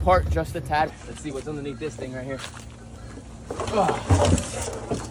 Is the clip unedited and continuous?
no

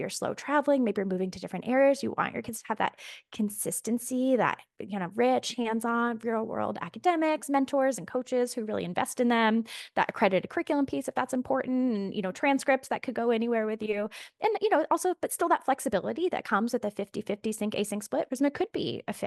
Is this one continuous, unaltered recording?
no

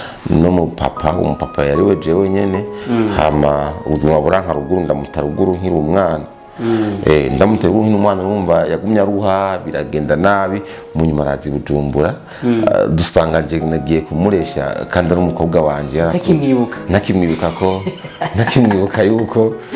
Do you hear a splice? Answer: no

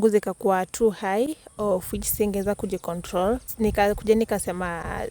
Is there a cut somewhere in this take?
yes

